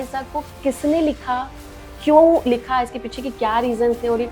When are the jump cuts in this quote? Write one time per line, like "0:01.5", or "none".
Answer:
none